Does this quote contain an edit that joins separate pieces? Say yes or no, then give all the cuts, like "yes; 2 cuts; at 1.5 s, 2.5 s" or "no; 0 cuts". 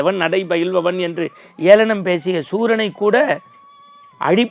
no; 0 cuts